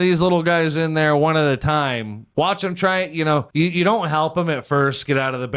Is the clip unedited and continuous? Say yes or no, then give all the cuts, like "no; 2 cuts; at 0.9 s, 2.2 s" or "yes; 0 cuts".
no; 2 cuts; at 2.2 s, 3.5 s